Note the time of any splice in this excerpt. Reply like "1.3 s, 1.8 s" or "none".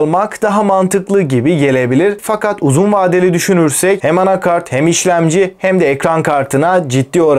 4.0 s